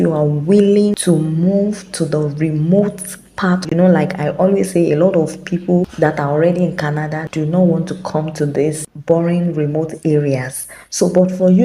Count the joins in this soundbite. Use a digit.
4